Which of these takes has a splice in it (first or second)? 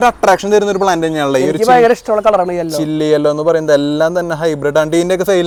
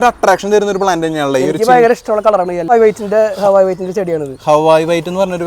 second